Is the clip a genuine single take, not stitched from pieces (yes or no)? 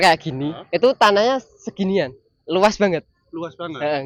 yes